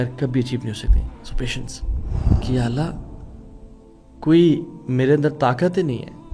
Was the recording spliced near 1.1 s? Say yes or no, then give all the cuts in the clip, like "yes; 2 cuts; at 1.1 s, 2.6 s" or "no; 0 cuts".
no; 1 cut; at 2.4 s